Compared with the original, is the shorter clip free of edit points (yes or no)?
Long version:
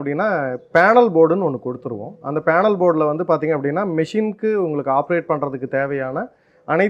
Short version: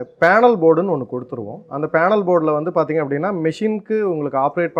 yes